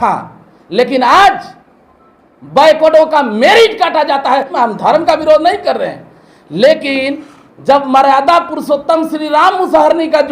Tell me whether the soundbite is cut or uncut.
cut